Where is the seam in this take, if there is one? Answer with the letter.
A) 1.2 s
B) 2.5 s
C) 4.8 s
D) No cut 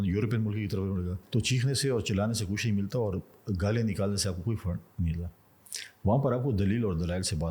A